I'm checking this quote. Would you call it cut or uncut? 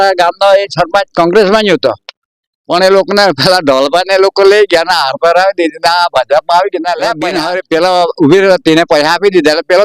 cut